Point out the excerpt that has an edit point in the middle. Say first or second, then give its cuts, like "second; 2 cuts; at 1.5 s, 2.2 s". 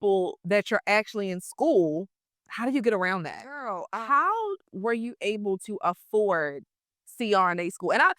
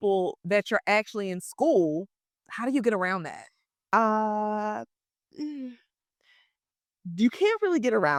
first; 1 cut; at 3.8 s